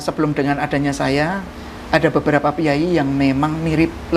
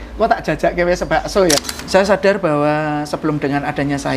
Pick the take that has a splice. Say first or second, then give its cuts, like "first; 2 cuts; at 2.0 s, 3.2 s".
second; 1 cut; at 1.6 s